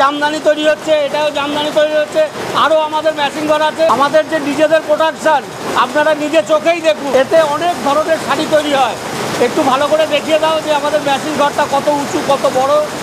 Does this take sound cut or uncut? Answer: cut